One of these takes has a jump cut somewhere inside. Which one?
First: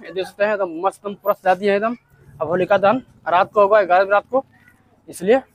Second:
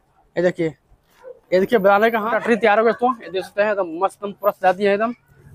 second; 1 cut; at 2.2 s

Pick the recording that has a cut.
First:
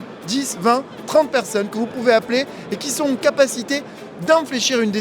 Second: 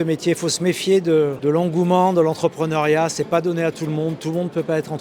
second; 1 cut; at 1.4 s

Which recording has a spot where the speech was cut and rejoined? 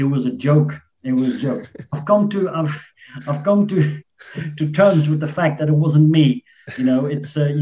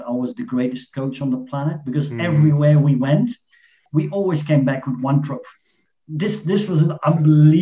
second; 2 cuts; at 3.8 s, 5.8 s

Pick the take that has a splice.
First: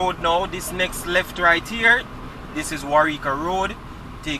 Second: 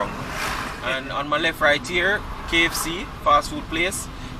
second; 1 cut; at 1.0 s

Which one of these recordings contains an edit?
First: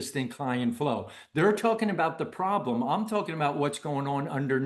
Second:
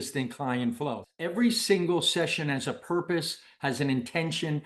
second; 1 cut; at 1.1 s

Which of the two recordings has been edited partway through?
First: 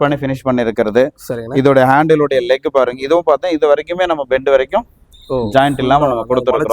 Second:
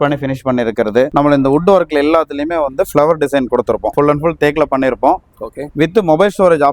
second; 2 cuts; at 1.1 s, 3.9 s

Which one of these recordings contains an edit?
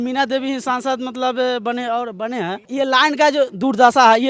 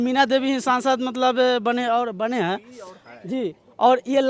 first; 1 cut; at 2.7 s

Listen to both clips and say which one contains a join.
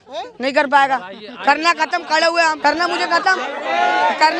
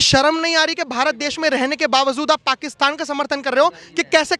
first; 1 cut; at 2.6 s

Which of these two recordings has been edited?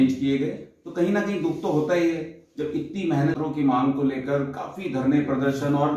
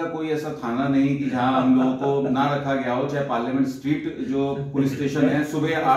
first; 1 cut; at 3.3 s

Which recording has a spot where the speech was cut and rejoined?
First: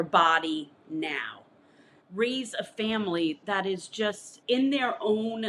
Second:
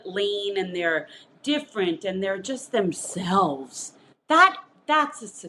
first; 2 cuts; at 2.0 s, 4.3 s

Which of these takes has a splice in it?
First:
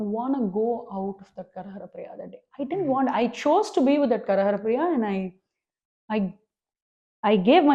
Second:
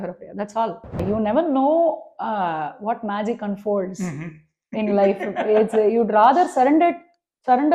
second; 1 cut; at 1.0 s

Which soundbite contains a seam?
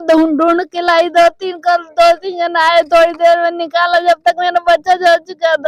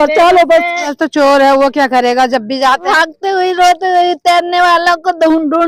second; 2 cuts; at 1.0 s, 2.9 s

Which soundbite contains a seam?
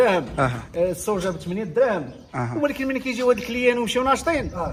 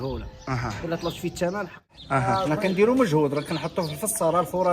second; 1 cut; at 2.1 s

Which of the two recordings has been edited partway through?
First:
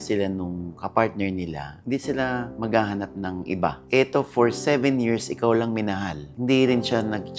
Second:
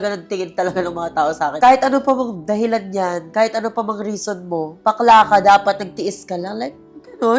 second; 1 cut; at 1.5 s

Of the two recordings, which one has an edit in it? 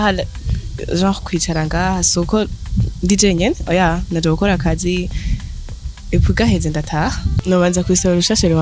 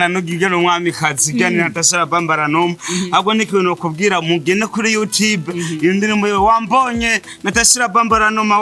first; 1 cut; at 7.3 s

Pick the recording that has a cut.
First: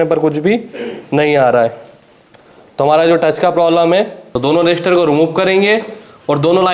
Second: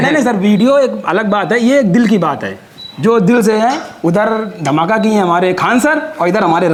first; 1 cut; at 4.2 s

